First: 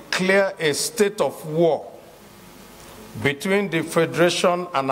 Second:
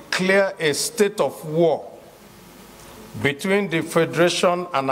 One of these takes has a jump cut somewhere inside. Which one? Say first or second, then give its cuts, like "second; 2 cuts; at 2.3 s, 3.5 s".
second; 1 cut; at 1.0 s